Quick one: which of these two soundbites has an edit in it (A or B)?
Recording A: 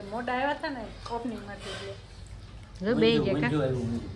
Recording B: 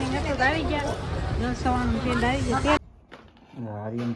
B